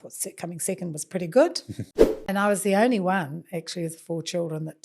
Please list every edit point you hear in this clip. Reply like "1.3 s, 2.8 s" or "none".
2.1 s